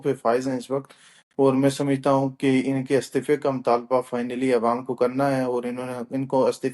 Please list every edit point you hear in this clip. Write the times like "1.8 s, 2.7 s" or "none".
none